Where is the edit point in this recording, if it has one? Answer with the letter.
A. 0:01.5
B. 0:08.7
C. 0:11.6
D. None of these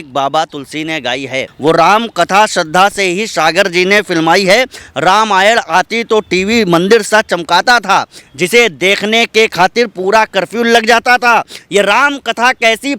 A